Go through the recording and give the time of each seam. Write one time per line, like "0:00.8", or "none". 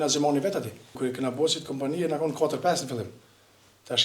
0:01.0